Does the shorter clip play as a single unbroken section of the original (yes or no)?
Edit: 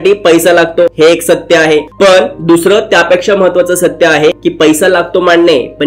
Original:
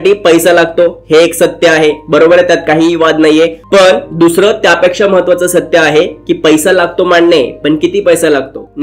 no